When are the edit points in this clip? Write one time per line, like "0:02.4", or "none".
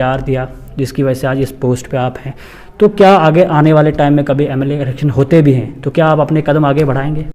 none